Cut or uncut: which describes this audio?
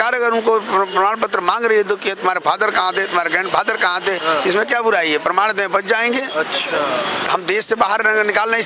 uncut